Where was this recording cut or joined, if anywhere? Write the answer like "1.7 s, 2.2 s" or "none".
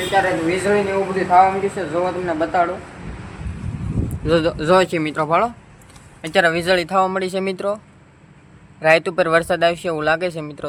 none